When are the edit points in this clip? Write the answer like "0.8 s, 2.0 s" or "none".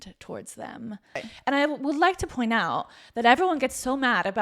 1.3 s